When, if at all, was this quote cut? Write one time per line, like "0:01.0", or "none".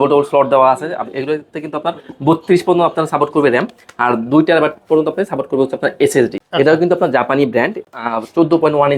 0:06.4
0:07.9